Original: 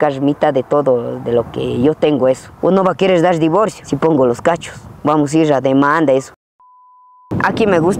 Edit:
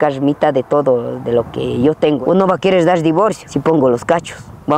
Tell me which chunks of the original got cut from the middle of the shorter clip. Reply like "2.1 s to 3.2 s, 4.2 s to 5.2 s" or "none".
2.2 s to 2.6 s